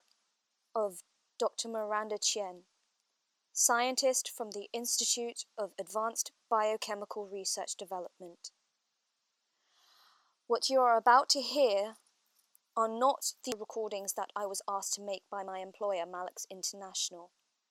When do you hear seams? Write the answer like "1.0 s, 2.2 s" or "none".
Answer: 13.6 s

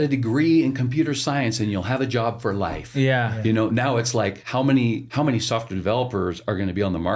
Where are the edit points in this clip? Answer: 4.4 s, 5.1 s

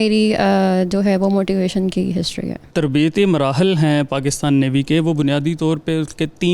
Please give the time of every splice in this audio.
2.6 s

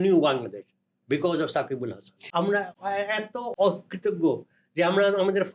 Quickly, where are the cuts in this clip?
2.2 s, 3.5 s

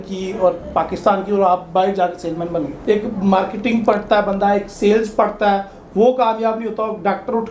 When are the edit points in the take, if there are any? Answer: 2.8 s

